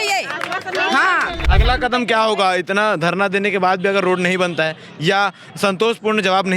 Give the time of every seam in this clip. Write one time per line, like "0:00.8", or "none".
0:01.5